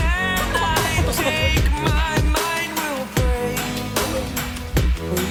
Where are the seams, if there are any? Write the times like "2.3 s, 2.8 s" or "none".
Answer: none